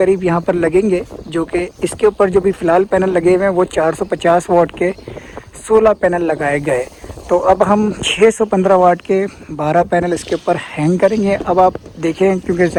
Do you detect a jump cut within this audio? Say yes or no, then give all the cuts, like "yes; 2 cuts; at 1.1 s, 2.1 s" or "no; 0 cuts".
no; 0 cuts